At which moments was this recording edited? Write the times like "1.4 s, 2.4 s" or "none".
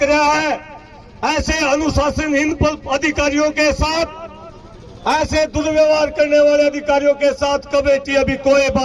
none